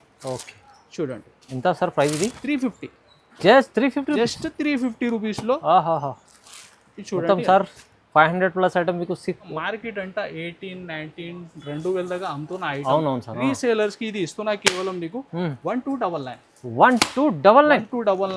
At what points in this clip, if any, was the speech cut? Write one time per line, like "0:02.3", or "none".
0:09.5